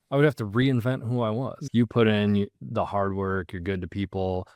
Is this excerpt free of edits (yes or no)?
no